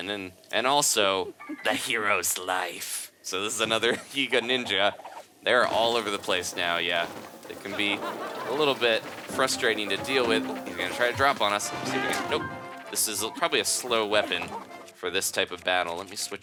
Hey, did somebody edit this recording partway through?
no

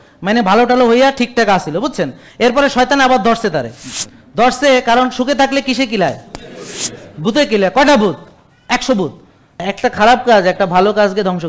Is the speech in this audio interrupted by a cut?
yes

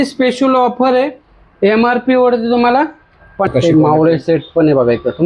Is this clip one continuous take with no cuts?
no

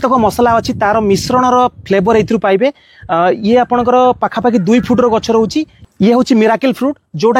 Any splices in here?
no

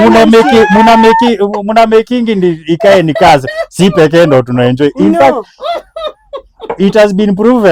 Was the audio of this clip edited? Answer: no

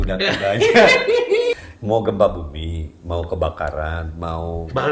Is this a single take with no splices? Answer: no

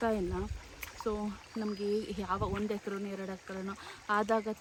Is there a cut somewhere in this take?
no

